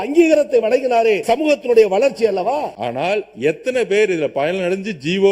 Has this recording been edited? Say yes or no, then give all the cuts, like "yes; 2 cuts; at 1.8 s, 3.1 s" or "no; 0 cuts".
yes; 2 cuts; at 1.2 s, 2.8 s